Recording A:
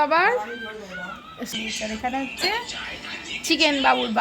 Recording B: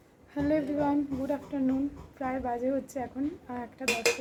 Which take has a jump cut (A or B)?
A